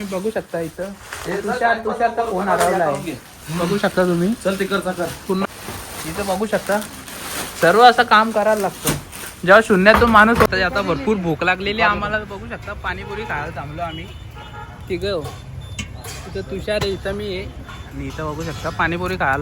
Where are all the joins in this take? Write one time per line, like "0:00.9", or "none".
0:05.5
0:10.5